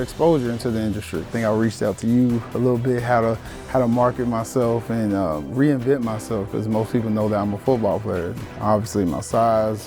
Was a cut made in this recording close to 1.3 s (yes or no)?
yes